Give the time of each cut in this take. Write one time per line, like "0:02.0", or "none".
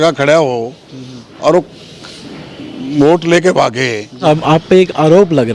0:04.2